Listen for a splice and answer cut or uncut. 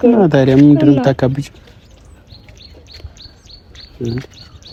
uncut